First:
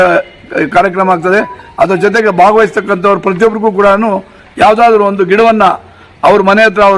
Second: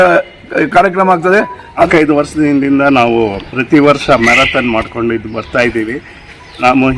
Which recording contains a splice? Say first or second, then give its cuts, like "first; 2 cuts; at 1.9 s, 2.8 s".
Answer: second; 1 cut; at 1.9 s